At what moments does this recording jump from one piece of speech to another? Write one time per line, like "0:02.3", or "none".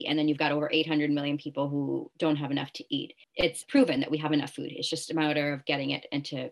0:03.6